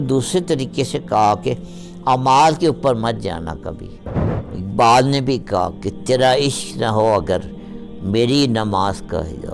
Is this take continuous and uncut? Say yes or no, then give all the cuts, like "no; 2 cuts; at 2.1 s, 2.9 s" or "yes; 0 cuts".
no; 1 cut; at 4.4 s